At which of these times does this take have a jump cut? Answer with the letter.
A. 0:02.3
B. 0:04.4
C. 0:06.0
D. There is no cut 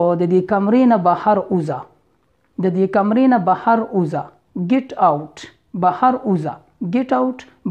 D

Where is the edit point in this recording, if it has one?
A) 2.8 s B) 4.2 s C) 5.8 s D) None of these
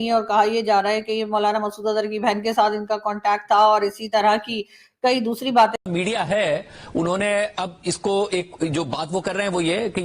C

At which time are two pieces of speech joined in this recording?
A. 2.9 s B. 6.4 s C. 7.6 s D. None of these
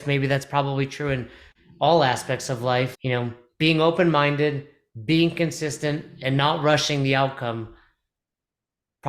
A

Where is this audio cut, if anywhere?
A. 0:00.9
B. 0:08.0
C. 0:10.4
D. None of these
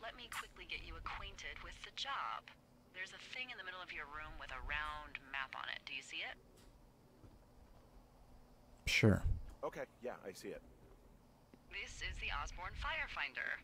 A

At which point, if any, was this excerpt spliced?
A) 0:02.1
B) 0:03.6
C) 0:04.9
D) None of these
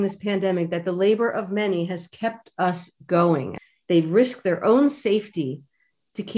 B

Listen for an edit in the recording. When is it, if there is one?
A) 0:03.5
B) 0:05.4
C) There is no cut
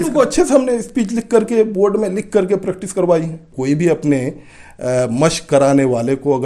A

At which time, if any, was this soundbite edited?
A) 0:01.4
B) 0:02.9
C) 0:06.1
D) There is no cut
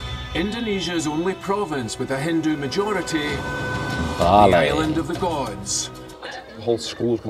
C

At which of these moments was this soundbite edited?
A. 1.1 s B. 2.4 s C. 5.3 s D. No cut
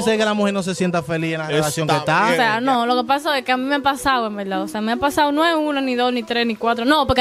B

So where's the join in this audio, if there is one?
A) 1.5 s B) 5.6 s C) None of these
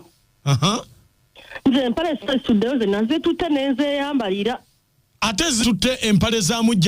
B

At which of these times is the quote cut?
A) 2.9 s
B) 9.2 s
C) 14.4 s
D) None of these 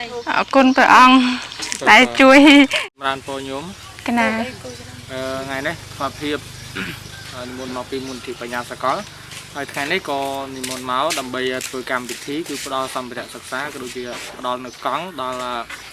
A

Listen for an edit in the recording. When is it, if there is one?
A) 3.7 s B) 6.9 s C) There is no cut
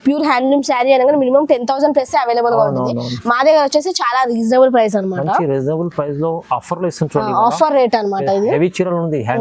C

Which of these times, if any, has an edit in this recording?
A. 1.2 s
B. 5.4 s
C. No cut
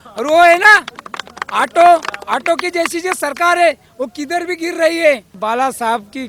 B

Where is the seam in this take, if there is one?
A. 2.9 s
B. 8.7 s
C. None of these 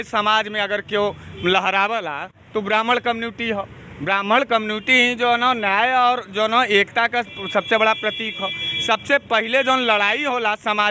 C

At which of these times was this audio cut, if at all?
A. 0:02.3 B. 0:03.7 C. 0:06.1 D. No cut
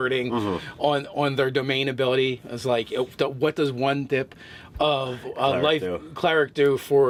D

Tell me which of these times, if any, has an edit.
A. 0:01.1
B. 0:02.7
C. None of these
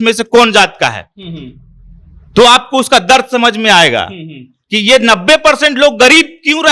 C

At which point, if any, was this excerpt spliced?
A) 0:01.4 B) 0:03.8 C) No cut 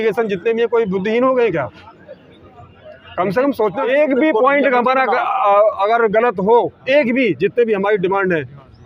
B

